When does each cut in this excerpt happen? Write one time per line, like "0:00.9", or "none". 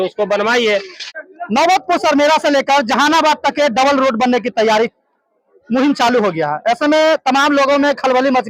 0:01.1